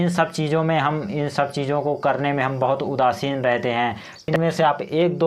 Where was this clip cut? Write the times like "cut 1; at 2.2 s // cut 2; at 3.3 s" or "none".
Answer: cut 1; at 4.3 s